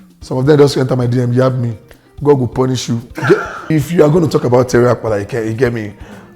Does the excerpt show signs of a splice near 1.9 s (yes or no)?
no